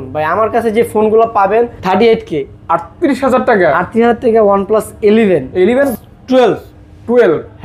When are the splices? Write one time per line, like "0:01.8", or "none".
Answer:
0:01.8
0:05.9